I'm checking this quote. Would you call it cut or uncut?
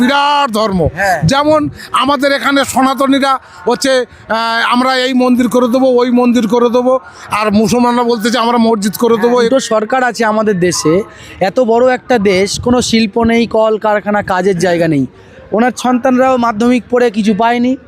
cut